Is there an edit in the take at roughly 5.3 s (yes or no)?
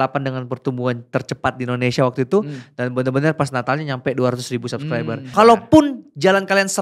yes